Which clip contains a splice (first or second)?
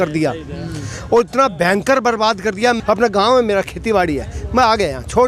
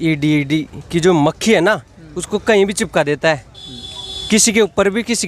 first